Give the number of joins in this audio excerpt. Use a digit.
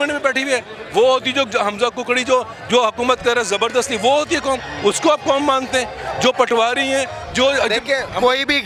0